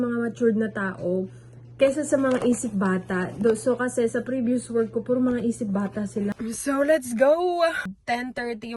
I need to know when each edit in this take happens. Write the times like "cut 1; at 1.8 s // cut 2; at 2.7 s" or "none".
cut 1; at 6.3 s // cut 2; at 7.9 s